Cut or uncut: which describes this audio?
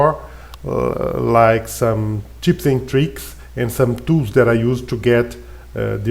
uncut